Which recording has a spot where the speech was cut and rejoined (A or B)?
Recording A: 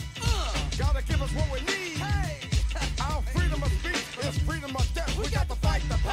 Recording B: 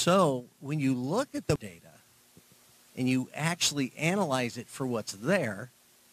B